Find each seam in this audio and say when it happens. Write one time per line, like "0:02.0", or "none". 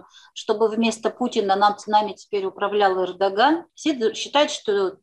0:03.7